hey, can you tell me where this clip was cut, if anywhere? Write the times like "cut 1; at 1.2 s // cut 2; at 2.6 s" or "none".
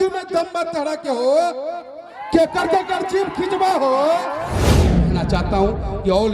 cut 1; at 5.0 s

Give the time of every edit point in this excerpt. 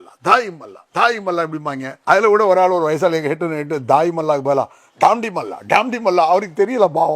cut 1; at 1.9 s

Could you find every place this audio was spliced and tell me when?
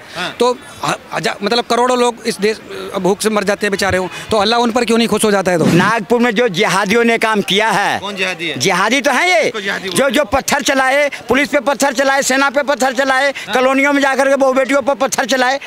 cut 1; at 5.7 s

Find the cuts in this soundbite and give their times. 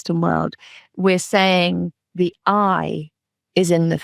cut 1; at 2.0 s

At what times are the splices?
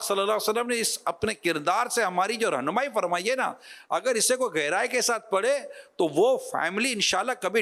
none

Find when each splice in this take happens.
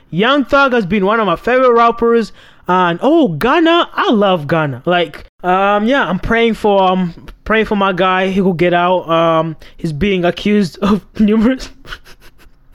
cut 1; at 5.3 s

